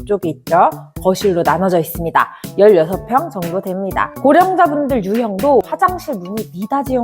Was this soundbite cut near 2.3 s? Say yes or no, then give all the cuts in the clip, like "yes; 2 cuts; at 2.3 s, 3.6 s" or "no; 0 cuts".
no; 2 cuts; at 4.1 s, 5.7 s